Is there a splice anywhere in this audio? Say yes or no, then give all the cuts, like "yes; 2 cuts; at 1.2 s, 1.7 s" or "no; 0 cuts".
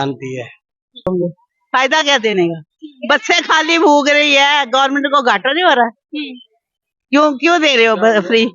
yes; 1 cut; at 1.1 s